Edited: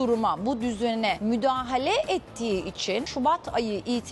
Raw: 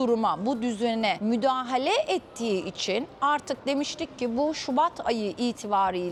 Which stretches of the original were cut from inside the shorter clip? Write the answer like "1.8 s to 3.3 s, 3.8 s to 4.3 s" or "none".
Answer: 3.1 s to 4.6 s